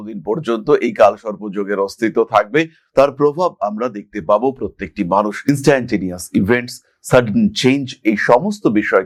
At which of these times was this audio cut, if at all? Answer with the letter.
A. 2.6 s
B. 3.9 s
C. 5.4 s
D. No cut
D